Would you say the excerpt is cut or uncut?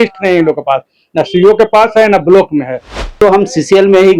cut